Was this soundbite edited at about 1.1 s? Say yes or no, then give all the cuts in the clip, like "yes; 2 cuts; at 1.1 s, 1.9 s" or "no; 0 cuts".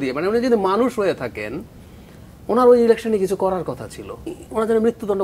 no; 1 cut; at 4.3 s